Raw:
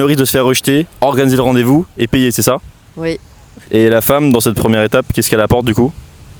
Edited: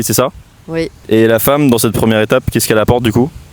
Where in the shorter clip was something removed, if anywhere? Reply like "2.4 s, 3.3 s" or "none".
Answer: 1.0 s